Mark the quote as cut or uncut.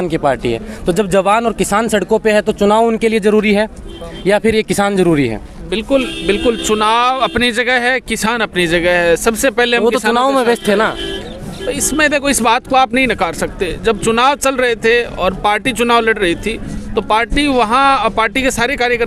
uncut